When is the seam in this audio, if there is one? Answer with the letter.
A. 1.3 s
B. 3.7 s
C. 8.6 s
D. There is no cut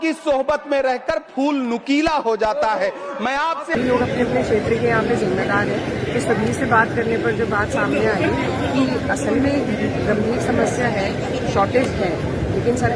B